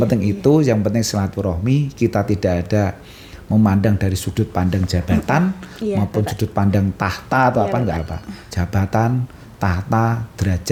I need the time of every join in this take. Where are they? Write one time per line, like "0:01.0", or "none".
none

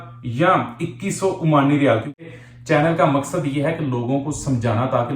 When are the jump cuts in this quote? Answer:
0:02.2

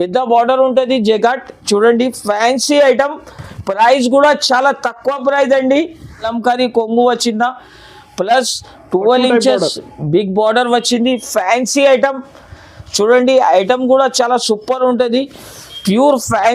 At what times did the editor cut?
0:06.2

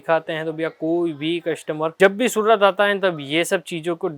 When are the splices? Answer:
none

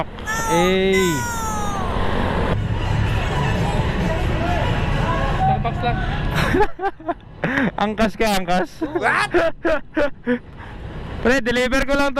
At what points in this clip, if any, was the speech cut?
0:02.6

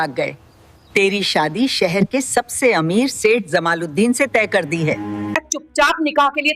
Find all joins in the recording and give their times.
0:05.2

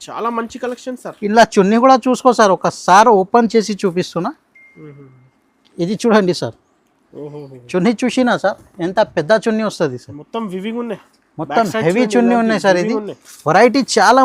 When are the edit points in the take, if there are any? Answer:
none

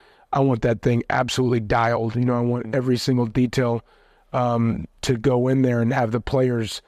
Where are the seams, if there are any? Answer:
none

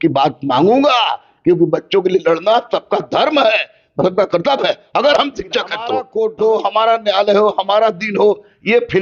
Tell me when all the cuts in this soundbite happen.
0:06.0

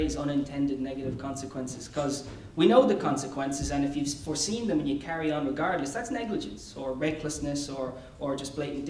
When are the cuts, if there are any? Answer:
0:01.5

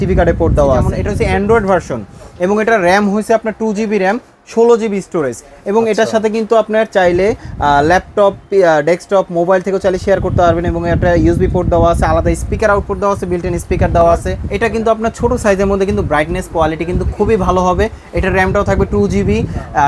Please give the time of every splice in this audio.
0:01.0
0:14.4

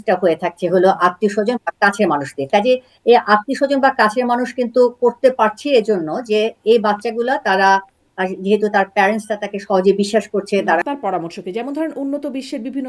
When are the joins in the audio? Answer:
0:10.8

